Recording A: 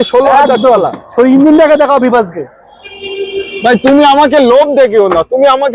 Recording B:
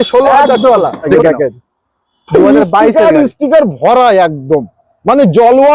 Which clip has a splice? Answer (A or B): B